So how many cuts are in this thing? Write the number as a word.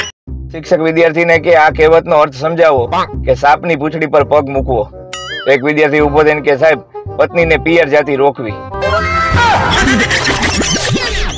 zero